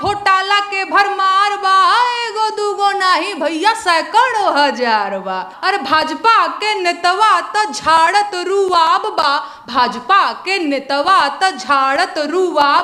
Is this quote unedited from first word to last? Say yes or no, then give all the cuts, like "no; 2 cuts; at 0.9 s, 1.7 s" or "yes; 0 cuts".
no; 1 cut; at 5.5 s